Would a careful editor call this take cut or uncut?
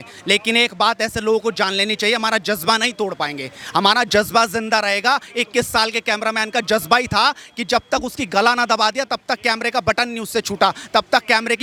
uncut